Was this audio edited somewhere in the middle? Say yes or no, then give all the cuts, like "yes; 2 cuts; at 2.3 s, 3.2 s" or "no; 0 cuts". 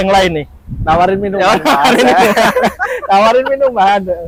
no; 0 cuts